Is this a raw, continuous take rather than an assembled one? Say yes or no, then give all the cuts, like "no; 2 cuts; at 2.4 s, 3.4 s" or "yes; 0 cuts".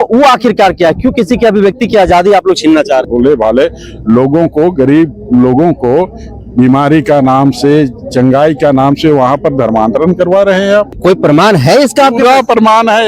no; 1 cut; at 3.1 s